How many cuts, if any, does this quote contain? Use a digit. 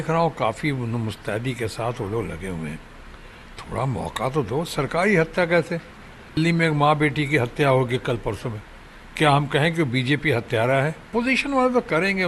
2